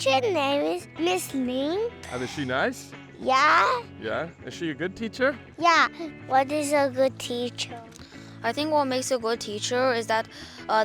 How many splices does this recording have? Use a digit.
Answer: 3